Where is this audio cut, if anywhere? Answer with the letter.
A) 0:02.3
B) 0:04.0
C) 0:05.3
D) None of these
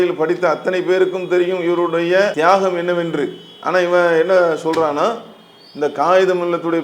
A